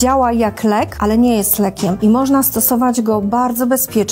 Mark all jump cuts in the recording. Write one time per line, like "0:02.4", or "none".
0:00.9
0:02.0